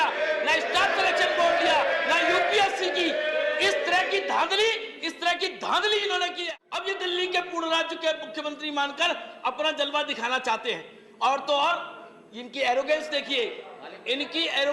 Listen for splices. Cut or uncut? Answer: cut